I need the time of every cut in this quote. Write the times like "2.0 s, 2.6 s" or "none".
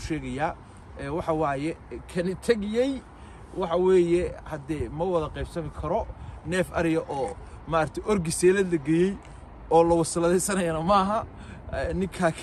none